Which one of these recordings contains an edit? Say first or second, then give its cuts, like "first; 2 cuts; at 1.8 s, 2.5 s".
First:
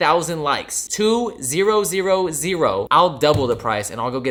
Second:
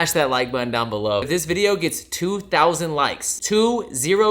second; 1 cut; at 1.2 s